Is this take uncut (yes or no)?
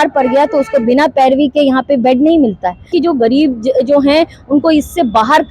no